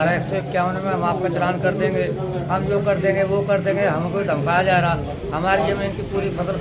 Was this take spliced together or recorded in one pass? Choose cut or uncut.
uncut